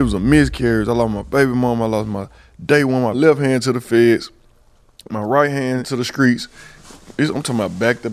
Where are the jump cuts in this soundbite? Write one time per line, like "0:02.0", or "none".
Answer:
0:03.2
0:06.0